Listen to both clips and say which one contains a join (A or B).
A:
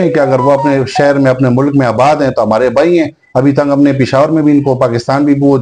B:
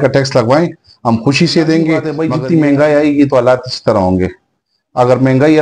B